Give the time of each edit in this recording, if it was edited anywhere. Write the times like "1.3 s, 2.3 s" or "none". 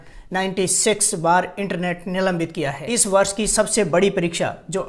2.8 s